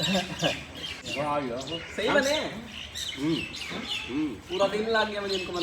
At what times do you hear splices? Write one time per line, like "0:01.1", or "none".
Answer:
0:01.1